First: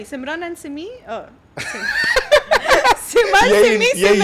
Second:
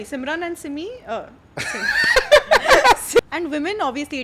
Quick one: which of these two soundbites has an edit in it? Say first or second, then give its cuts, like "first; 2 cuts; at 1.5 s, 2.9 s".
second; 1 cut; at 3.2 s